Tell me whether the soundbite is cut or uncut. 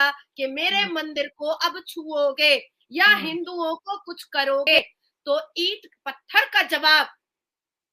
cut